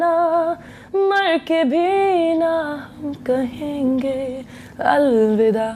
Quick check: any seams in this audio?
no; 0 cuts

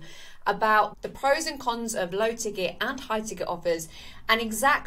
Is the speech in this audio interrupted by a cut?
yes; 1 cut; at 0.9 s

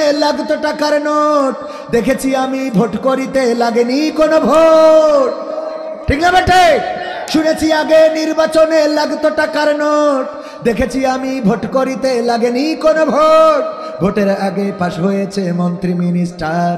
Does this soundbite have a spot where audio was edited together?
no; 0 cuts

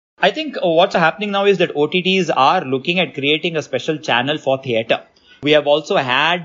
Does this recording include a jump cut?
yes; 2 cuts; at 0.9 s, 5.4 s

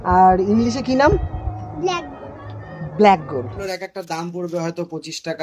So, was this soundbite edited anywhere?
yes; 1 cut; at 3.6 s

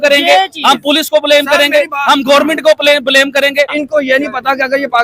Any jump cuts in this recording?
yes; 1 cut; at 3.8 s

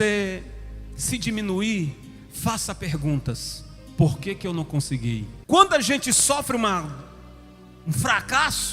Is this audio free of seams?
no; 1 cut; at 5.3 s

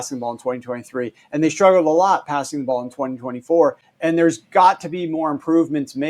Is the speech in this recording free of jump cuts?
yes; 0 cuts

